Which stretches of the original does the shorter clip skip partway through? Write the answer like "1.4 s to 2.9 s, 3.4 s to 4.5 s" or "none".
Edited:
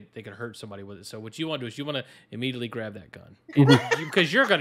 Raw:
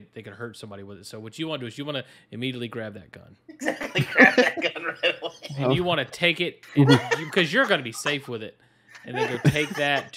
3.4 s to 6.6 s